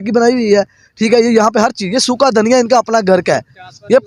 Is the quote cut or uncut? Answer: uncut